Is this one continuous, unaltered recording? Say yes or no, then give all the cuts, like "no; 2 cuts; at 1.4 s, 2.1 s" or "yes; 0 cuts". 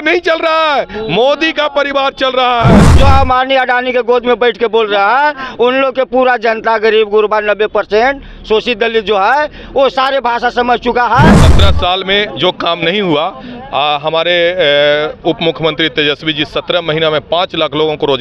no; 2 cuts; at 2.8 s, 11.5 s